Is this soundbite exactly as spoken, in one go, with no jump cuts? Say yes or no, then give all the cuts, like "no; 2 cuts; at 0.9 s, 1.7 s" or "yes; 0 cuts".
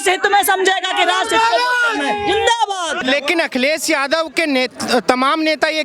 no; 1 cut; at 3.0 s